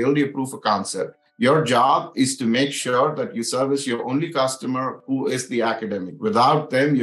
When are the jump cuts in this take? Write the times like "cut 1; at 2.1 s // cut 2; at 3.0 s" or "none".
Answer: cut 1; at 1.2 s